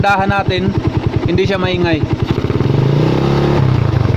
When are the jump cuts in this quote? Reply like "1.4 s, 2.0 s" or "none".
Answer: none

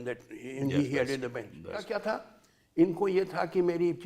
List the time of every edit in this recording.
1.9 s

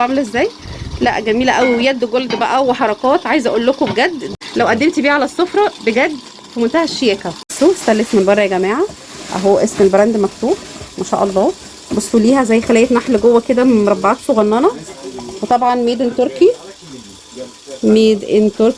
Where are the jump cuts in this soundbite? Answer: 4.2 s, 7.5 s

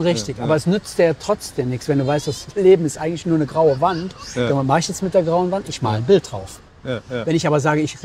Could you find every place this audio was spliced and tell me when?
none

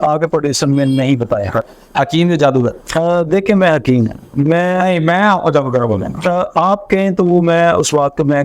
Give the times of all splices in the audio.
1.7 s

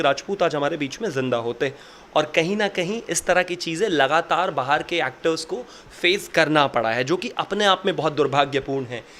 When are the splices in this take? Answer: none

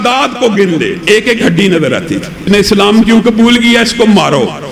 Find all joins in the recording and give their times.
2.5 s

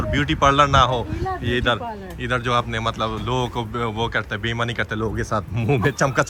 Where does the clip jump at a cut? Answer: none

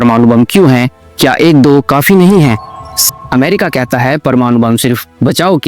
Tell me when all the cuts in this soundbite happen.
2.9 s

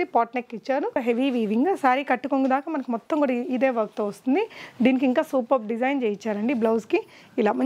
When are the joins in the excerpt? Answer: 1.0 s

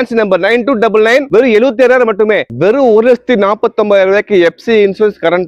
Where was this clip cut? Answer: 1.3 s, 2.4 s

